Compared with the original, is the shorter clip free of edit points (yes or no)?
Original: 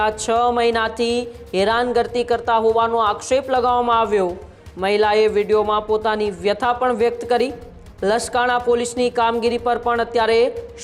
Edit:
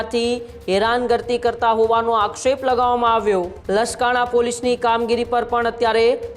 no